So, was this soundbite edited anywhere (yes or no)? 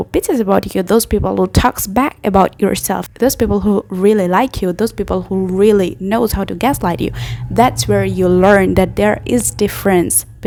no